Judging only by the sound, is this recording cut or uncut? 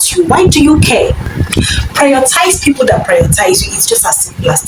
cut